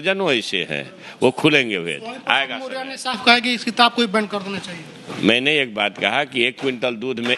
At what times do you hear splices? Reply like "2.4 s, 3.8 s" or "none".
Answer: none